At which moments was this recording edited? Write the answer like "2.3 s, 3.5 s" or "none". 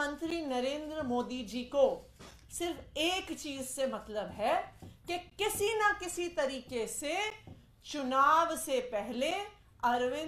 none

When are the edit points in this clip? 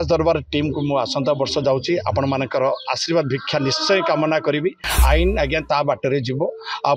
4.9 s

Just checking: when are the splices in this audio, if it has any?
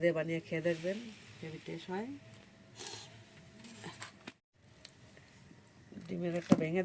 4.5 s

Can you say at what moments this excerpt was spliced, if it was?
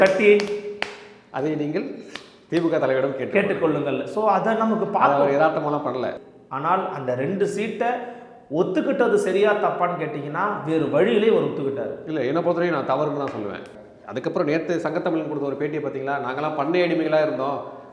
6.1 s, 13.7 s

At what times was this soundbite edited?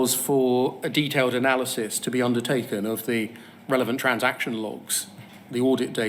none

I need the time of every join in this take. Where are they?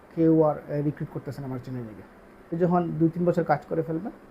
2.5 s

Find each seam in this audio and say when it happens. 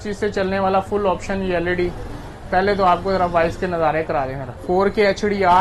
4.5 s

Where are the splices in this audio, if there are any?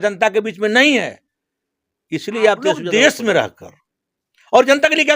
2.8 s

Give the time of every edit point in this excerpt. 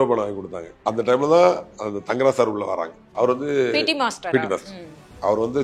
0.8 s, 3.0 s

